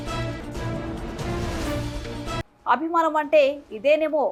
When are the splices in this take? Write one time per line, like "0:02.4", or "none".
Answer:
none